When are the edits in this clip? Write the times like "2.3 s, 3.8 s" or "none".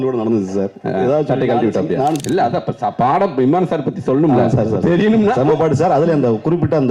2.2 s